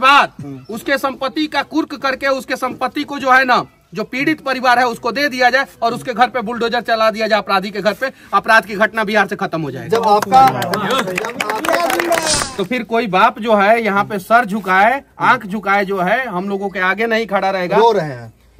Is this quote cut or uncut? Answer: cut